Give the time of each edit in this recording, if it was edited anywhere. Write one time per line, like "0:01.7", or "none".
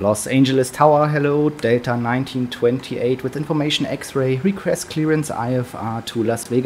none